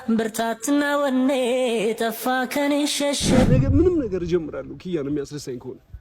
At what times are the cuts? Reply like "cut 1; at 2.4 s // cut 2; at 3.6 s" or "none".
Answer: cut 1; at 3.4 s